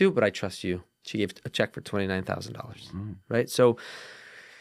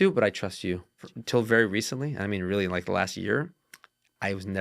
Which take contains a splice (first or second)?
second